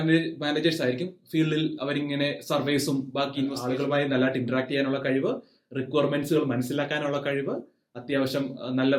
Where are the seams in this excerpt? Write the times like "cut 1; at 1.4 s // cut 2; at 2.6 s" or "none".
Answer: cut 1; at 3.6 s